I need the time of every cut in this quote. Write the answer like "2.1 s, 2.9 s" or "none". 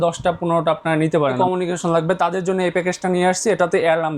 1.4 s